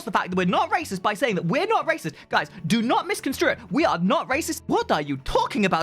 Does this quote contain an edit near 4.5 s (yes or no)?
yes